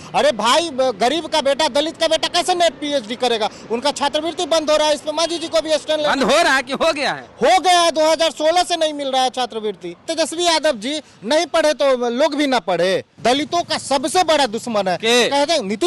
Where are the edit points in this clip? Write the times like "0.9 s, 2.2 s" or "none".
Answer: 10.0 s, 13.1 s